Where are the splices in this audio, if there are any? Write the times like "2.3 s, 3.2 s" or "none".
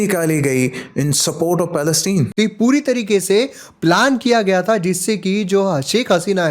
2.3 s